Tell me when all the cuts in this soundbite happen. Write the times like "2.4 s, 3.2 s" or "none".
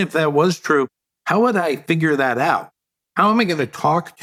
none